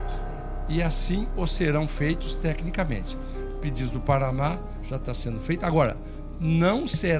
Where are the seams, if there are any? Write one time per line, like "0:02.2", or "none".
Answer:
none